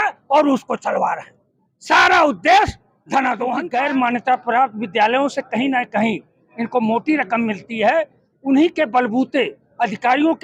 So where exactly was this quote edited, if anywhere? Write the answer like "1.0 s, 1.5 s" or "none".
3.6 s